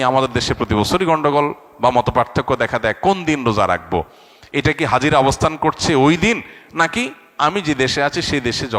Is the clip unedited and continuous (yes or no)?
yes